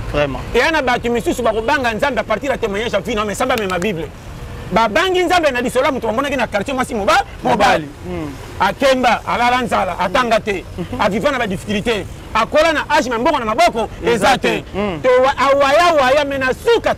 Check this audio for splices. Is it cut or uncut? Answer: uncut